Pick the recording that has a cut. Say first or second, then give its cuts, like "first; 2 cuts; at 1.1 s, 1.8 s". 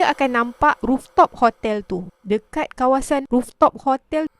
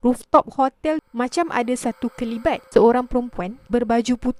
first; 2 cuts; at 0.8 s, 2.1 s